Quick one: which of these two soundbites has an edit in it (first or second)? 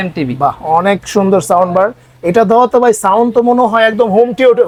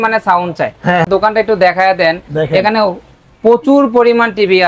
second